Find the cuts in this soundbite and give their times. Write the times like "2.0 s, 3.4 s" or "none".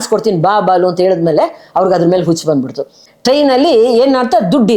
3.0 s